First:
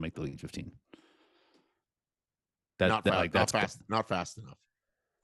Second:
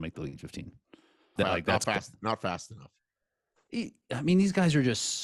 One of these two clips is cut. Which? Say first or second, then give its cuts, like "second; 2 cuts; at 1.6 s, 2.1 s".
second; 1 cut; at 1.3 s